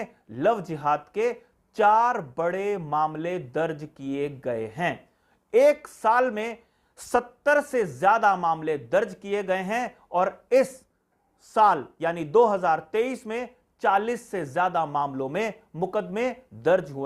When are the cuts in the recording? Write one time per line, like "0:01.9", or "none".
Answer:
none